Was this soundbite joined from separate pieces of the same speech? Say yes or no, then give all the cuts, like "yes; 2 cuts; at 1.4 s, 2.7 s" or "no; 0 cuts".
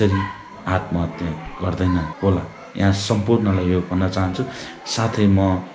no; 0 cuts